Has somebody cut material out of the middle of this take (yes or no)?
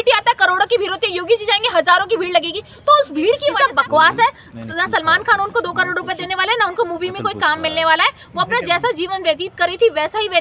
yes